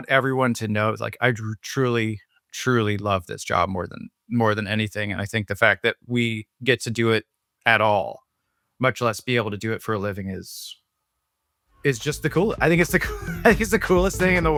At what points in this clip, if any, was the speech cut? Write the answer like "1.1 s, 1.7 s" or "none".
none